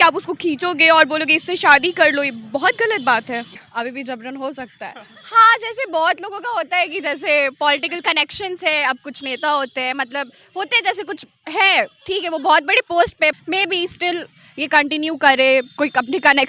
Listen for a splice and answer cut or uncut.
cut